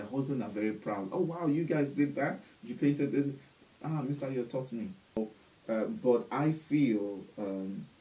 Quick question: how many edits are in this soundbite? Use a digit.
1